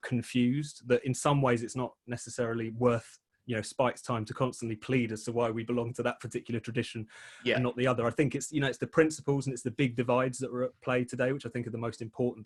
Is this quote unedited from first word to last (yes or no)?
yes